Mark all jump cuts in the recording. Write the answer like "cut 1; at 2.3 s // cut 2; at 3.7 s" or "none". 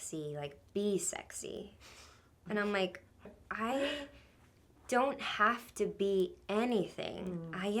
cut 1; at 3.3 s